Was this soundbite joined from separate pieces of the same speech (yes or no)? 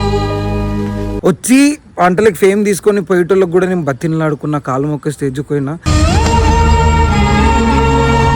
yes